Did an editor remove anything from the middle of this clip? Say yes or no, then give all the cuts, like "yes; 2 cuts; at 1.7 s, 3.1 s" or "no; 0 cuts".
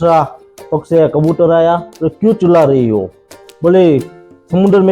no; 0 cuts